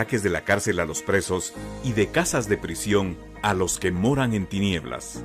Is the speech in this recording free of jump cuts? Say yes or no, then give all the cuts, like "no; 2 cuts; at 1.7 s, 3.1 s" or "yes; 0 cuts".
yes; 0 cuts